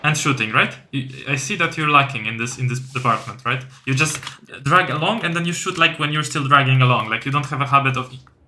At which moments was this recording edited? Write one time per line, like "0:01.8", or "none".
none